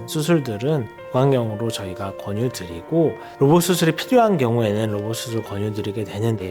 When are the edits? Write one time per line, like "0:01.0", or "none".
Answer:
0:01.0
0:03.3